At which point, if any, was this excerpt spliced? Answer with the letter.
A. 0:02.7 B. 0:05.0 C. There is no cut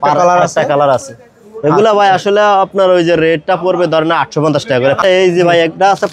B